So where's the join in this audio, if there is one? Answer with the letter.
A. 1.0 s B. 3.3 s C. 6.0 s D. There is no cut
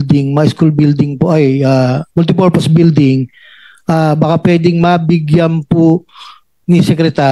D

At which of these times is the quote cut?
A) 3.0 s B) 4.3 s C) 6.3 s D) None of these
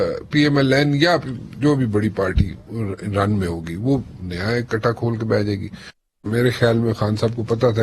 C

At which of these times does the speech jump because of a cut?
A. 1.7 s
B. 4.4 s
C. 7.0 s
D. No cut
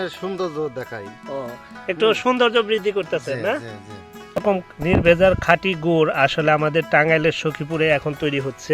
B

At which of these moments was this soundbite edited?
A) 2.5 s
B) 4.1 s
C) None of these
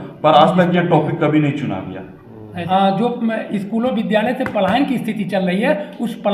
A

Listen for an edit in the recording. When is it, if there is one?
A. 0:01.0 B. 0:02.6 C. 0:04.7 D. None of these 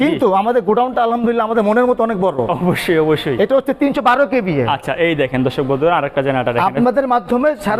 D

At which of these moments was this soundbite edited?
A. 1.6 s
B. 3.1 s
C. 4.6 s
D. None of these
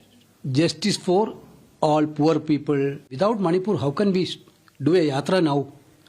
B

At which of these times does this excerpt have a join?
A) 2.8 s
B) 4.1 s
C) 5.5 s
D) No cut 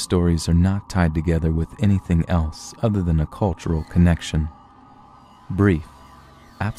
B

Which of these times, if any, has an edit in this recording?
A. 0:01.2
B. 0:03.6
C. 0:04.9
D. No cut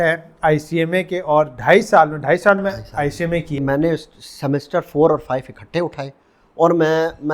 B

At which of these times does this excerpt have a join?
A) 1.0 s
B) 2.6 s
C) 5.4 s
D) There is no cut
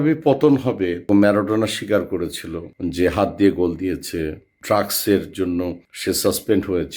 A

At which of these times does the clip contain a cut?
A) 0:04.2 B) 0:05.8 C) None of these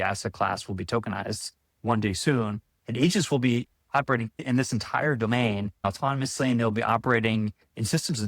B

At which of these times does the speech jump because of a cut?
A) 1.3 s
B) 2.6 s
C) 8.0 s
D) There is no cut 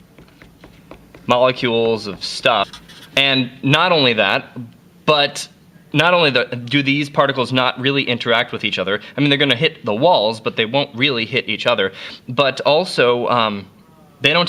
D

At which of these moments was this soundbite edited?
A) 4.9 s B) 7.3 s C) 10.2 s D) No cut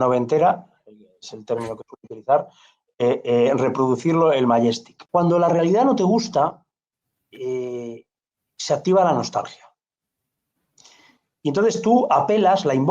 A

